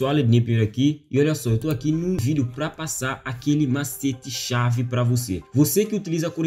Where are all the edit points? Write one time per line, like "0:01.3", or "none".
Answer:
0:02.2

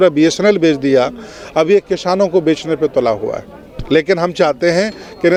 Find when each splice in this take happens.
none

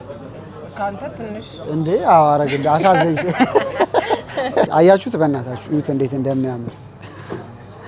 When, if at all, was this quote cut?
0:04.7

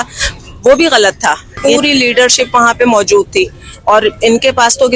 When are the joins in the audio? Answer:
0:01.6

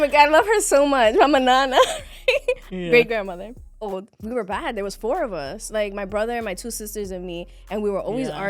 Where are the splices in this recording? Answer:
0:04.2

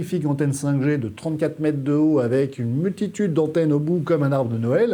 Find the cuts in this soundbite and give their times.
none

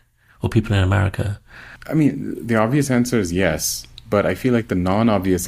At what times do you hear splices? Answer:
0:01.7

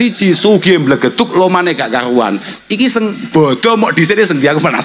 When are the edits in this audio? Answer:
none

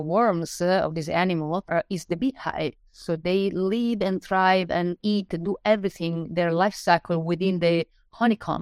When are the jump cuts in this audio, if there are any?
none

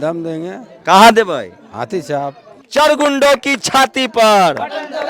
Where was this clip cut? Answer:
0:02.5

